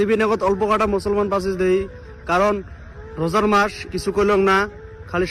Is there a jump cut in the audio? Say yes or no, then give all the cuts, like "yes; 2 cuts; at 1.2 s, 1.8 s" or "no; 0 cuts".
no; 0 cuts